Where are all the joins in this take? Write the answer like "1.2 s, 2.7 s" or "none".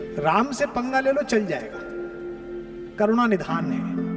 none